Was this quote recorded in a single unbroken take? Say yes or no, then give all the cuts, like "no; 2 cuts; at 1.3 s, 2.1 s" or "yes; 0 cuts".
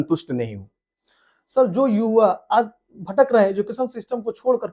yes; 0 cuts